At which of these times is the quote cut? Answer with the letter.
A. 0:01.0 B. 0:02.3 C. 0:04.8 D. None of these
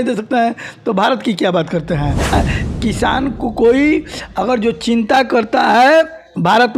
B